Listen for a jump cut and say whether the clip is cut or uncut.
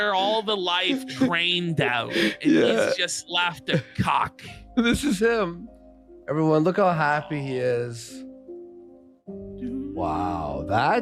uncut